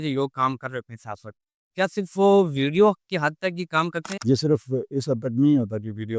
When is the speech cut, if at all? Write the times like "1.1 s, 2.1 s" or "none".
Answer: none